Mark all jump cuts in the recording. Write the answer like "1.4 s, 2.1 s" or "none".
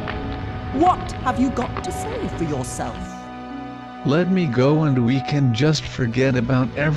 1.0 s